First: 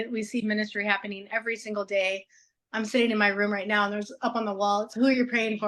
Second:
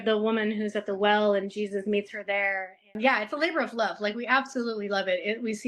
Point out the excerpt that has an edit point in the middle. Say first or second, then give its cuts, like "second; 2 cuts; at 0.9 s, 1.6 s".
second; 1 cut; at 2.9 s